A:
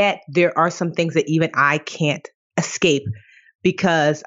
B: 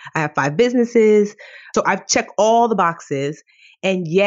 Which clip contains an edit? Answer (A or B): B